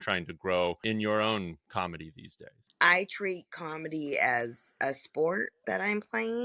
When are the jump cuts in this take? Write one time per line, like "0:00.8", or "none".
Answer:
0:00.8
0:02.6